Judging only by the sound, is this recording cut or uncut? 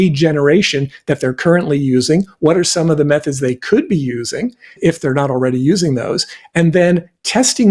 uncut